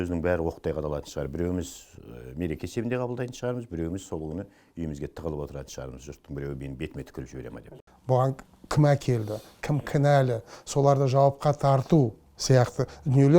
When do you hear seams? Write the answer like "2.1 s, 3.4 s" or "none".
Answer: 7.6 s